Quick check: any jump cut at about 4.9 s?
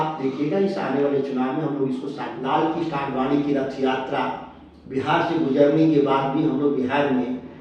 no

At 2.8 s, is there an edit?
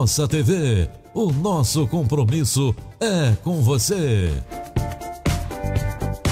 no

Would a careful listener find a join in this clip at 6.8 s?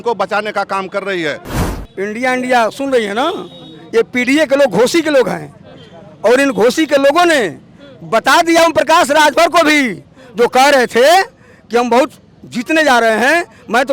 no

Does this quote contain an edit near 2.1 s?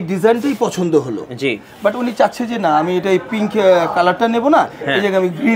no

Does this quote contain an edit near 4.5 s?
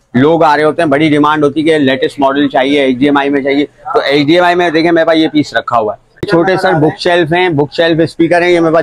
no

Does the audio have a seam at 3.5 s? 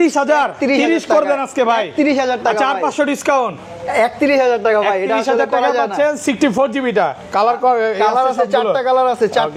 no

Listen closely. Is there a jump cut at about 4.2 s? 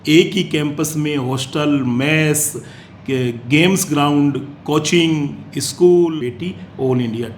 no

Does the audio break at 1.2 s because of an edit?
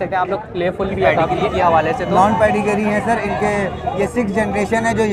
yes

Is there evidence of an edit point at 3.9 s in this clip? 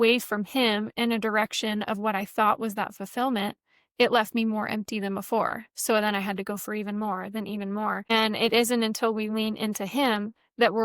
no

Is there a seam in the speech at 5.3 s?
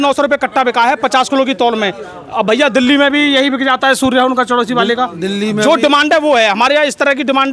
no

